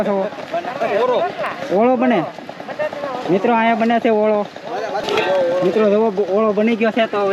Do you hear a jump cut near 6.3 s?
no; 1 cut; at 5.0 s

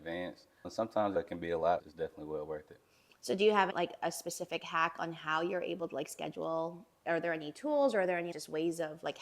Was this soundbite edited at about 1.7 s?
no; 2 cuts; at 3.7 s, 7.1 s

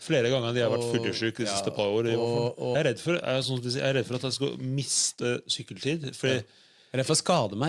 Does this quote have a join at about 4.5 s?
no; 1 cut; at 2.7 s

